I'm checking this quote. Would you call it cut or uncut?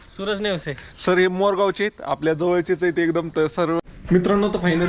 cut